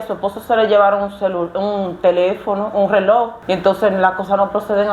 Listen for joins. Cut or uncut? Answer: cut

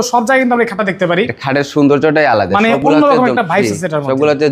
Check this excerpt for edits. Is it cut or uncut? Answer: uncut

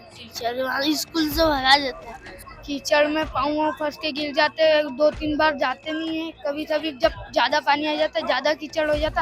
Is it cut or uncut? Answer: cut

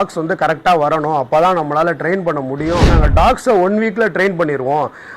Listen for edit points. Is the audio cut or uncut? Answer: cut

